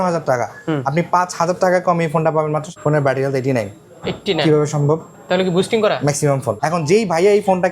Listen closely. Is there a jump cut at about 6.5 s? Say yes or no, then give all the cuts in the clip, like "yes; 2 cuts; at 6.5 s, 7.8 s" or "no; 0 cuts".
yes; 3 cuts; at 2.7 s, 5.1 s, 6.5 s